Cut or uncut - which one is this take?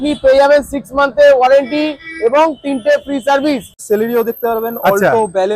cut